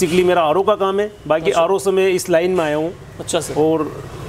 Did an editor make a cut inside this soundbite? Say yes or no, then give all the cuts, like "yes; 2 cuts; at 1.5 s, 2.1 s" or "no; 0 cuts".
no; 0 cuts